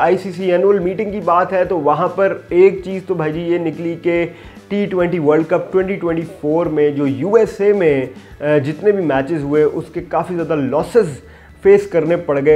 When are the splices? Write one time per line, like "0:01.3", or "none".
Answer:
none